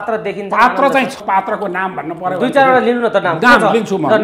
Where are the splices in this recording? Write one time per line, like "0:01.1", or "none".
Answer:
0:01.2